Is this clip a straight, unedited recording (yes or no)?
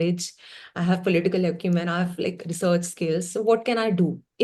yes